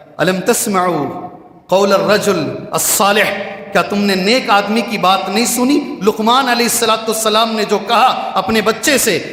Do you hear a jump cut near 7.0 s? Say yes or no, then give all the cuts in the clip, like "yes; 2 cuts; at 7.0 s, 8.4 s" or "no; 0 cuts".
no; 0 cuts